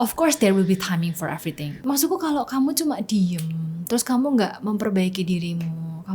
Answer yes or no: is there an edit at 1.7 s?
yes